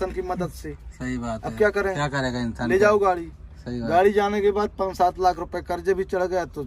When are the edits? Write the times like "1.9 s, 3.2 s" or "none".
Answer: none